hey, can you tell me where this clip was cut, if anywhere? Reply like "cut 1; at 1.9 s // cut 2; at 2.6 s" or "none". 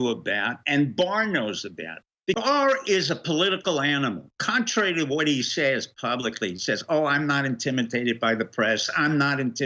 cut 1; at 2.4 s